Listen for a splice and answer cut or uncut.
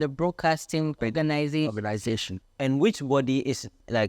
cut